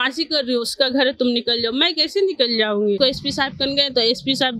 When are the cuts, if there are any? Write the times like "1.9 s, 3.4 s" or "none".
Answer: 3.0 s